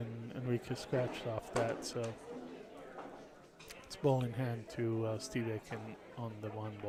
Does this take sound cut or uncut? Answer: uncut